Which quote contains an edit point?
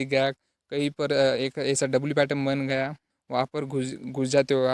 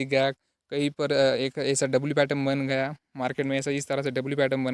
first; 1 cut; at 3.0 s

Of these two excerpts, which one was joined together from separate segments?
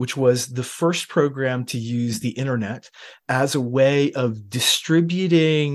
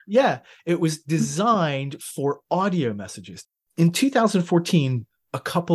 second; 1 cut; at 3.6 s

